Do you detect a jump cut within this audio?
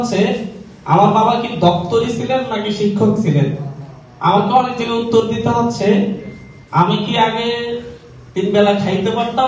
no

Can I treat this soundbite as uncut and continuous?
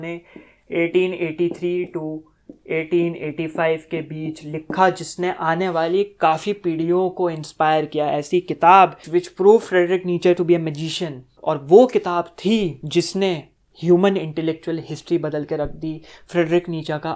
no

